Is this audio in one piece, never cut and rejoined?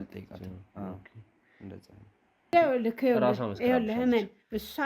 no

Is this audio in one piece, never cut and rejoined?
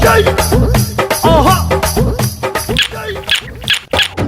yes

